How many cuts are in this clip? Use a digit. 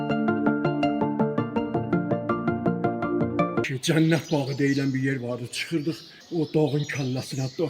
2